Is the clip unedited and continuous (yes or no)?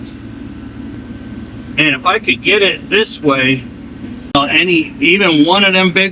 no